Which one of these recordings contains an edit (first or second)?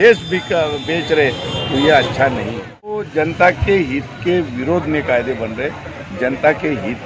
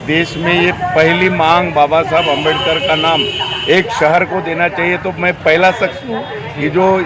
first